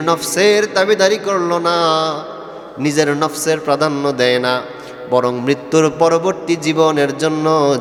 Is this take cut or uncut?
uncut